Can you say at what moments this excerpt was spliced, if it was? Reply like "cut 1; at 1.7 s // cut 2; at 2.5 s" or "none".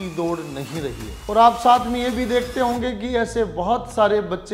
cut 1; at 1.1 s